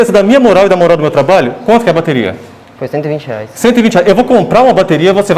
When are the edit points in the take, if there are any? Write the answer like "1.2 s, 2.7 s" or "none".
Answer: none